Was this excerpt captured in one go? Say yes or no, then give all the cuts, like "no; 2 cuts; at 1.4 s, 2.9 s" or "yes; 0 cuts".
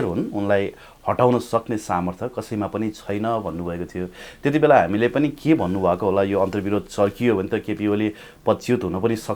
yes; 0 cuts